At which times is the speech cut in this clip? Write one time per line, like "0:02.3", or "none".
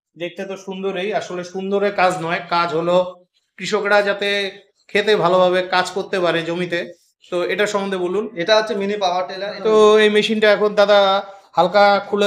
0:09.3